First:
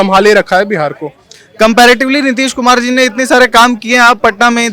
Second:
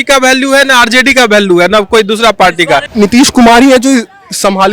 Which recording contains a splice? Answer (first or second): second